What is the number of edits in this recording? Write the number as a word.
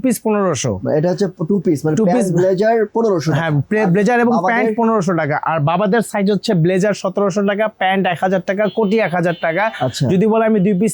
zero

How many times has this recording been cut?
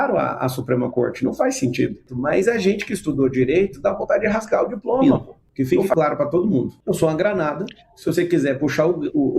three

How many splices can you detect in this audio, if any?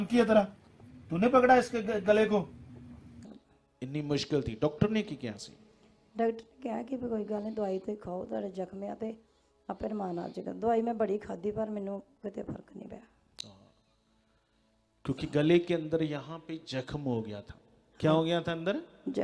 one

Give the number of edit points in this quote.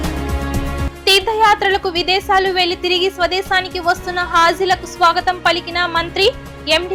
zero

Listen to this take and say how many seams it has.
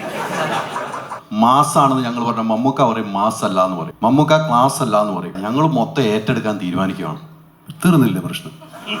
three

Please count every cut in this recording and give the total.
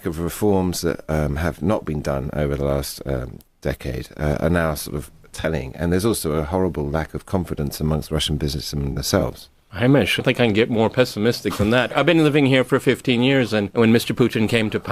one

